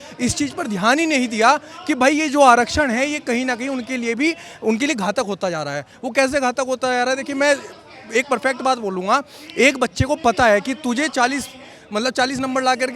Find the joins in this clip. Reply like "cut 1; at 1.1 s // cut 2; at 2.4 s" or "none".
none